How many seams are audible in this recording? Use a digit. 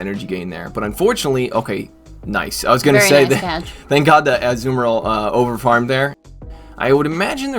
1